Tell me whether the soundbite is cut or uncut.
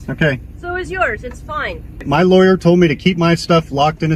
cut